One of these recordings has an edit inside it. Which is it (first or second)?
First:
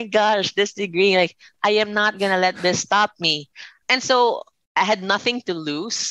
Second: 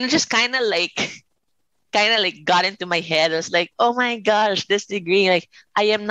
first